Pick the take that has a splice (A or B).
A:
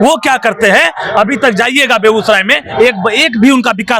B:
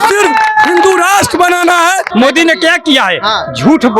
B